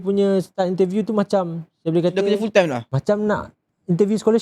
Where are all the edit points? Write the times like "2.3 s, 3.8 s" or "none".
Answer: 2.9 s

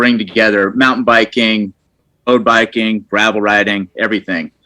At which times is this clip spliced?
2.1 s

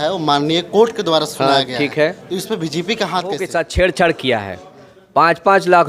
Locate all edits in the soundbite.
3.5 s

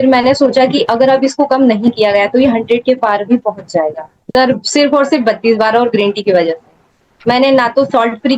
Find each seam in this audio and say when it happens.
4.1 s

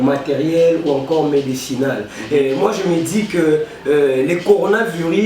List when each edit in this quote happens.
none

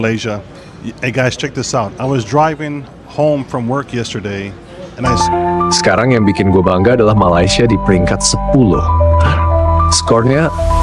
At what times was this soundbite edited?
5.1 s

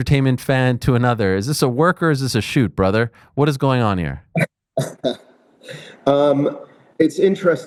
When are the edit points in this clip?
none

